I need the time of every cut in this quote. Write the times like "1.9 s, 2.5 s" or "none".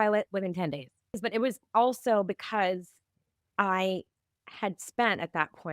1.2 s